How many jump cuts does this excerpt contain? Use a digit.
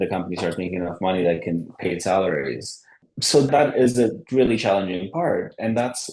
1